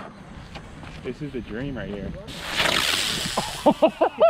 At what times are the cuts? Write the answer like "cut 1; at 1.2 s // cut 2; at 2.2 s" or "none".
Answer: cut 1; at 1.0 s // cut 2; at 2.3 s